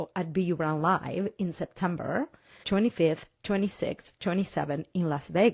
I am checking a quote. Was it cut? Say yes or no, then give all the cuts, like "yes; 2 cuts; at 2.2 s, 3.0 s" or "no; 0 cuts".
yes; 1 cut; at 2.6 s